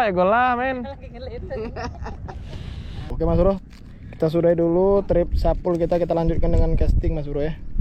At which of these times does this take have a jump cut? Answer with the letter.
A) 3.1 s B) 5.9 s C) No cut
A